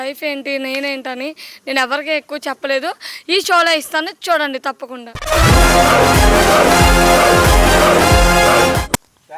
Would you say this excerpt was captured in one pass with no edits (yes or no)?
yes